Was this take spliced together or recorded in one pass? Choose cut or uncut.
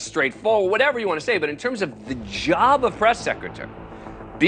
uncut